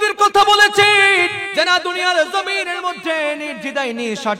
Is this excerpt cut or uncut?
cut